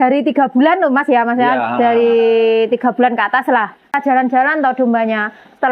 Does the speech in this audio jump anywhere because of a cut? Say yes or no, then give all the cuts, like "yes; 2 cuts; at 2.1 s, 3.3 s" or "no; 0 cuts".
yes; 1 cut; at 3.9 s